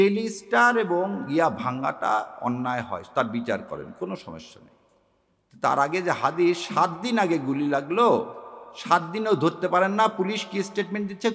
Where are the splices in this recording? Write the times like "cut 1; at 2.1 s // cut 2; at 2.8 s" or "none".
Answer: none